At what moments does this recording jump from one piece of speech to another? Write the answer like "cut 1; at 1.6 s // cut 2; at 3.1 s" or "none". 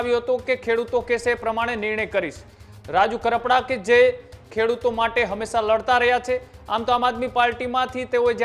none